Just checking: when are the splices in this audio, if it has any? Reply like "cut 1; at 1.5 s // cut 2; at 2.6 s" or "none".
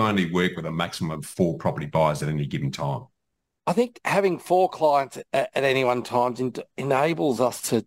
cut 1; at 3.5 s